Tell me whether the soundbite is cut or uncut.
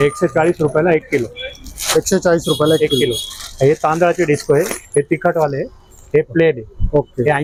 uncut